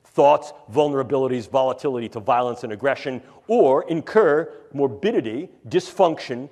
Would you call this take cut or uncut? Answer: uncut